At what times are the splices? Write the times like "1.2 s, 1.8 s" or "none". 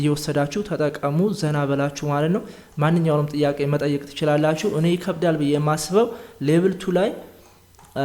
none